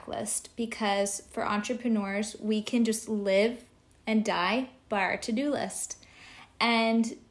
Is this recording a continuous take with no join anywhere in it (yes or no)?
yes